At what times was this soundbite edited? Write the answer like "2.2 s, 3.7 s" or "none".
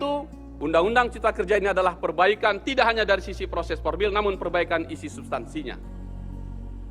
6.0 s